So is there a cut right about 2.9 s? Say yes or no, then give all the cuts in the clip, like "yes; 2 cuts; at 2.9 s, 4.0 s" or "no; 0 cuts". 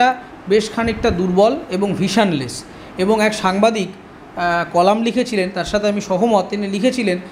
no; 0 cuts